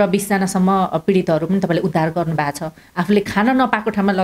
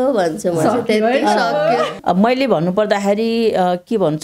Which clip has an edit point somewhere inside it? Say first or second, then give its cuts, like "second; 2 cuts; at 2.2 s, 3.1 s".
second; 1 cut; at 1.9 s